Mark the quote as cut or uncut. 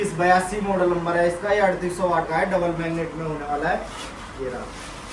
uncut